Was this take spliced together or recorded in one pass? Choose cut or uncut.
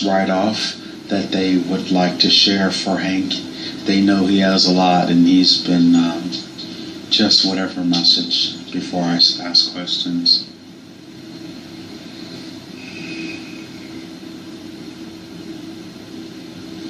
uncut